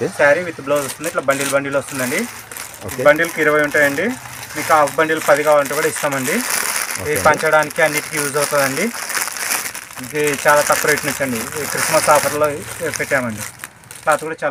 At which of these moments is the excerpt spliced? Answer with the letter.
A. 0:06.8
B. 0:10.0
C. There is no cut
C